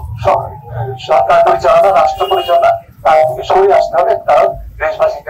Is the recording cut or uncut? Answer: uncut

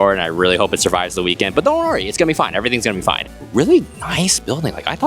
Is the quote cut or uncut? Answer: cut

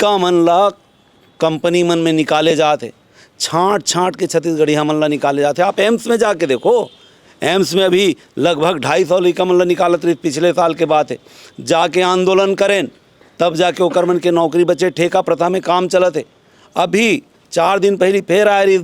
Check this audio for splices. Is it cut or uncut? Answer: uncut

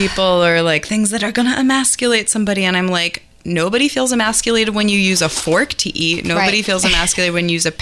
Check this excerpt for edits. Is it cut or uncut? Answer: uncut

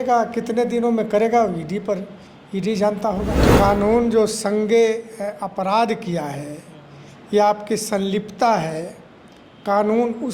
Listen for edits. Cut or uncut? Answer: cut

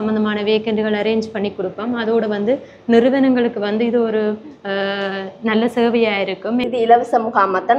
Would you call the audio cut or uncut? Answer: cut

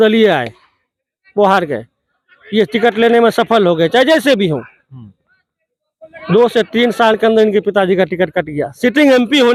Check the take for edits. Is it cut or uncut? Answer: uncut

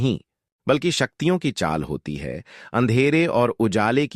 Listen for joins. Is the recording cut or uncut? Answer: cut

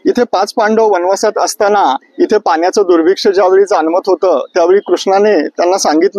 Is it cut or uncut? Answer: uncut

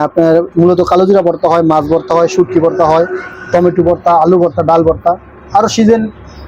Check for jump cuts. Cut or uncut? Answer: uncut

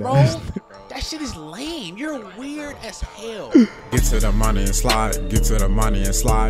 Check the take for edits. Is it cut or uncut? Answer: cut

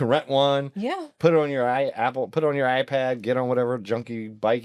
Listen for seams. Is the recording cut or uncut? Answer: uncut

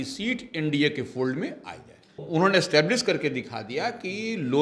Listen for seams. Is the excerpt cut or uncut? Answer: cut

